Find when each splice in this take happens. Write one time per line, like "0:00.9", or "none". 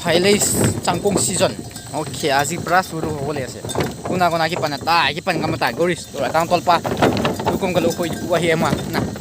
none